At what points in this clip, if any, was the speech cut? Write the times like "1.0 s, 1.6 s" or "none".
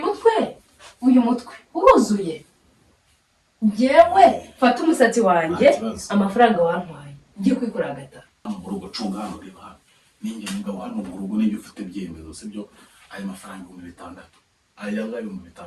8.4 s